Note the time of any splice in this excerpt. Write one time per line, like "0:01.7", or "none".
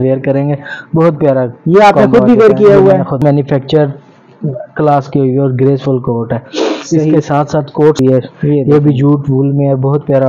0:03.2
0:08.0